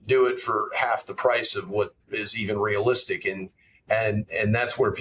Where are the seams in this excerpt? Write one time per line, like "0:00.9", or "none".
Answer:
none

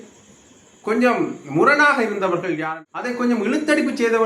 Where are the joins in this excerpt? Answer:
0:02.6

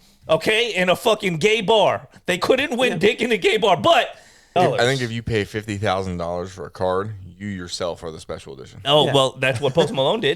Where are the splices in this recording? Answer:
0:04.5

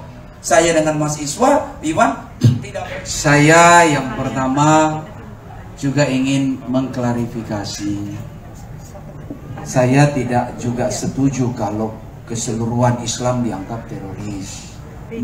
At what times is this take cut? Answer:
0:02.7

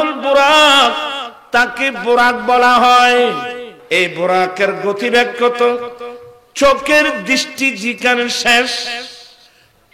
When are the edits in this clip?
0:03.7

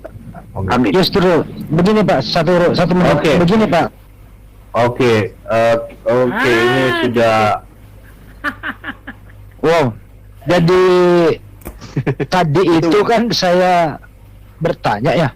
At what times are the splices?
none

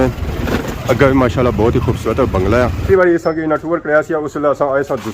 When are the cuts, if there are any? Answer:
0:02.8

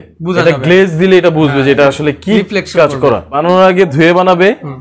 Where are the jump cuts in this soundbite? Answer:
0:03.4

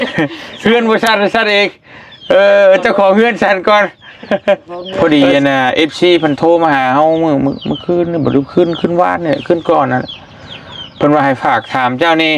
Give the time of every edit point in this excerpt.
0:04.8

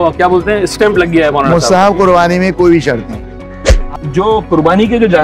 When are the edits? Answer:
0:03.9

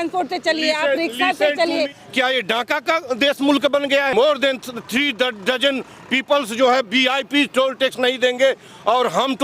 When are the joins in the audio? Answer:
0:02.0
0:04.1

